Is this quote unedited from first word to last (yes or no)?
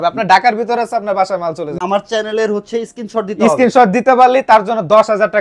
no